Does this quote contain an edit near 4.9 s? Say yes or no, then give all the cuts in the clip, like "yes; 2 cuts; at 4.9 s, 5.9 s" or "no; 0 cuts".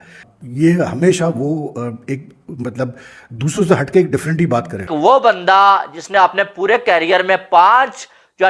yes; 1 cut; at 4.9 s